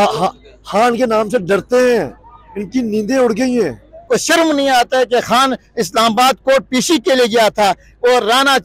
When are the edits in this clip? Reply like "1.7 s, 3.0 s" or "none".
4.0 s